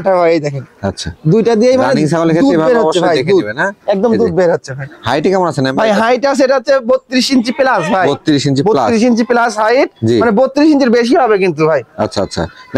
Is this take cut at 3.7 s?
no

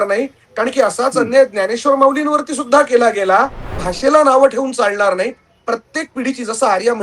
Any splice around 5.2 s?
no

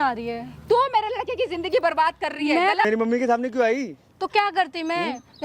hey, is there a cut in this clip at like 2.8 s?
yes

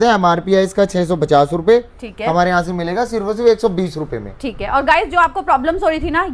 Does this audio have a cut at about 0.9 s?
no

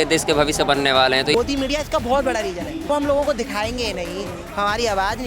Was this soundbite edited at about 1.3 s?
yes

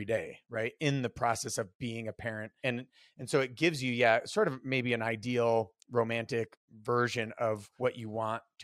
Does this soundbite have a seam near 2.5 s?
yes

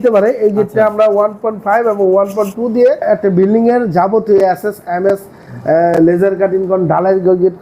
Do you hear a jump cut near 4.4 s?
no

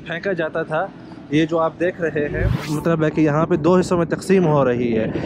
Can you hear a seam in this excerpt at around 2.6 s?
yes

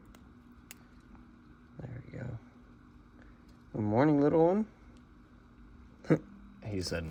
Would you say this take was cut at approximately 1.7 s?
no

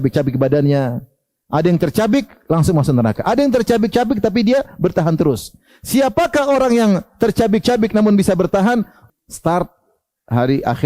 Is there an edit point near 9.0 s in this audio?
yes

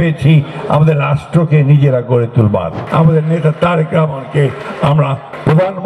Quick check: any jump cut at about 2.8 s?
yes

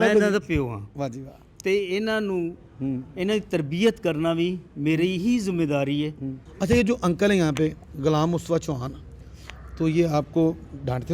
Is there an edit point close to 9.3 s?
no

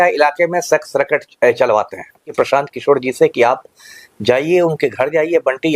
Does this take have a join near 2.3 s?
yes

